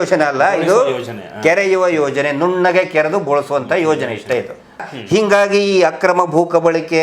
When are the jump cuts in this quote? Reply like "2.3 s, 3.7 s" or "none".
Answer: 4.8 s